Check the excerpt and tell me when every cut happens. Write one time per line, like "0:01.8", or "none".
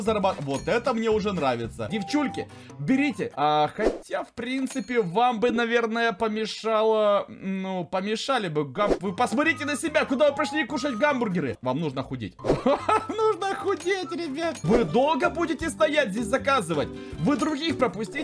0:01.9
0:11.6
0:14.6